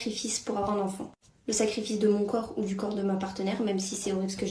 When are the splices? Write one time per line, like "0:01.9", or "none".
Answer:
none